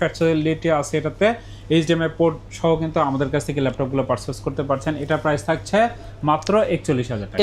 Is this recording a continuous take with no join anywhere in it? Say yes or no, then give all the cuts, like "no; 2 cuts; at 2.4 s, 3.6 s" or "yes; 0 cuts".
yes; 0 cuts